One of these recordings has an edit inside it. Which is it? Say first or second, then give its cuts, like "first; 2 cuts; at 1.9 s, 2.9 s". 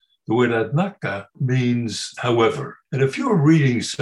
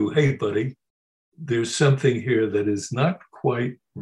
first; 3 cuts; at 1.3 s, 2.1 s, 2.8 s